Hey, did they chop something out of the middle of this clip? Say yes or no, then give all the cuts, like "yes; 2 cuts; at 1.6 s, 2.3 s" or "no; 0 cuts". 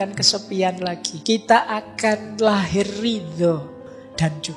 yes; 2 cuts; at 1.1 s, 3.8 s